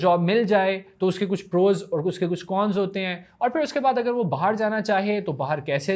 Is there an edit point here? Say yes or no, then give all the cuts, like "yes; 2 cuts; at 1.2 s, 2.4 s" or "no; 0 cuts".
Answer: no; 0 cuts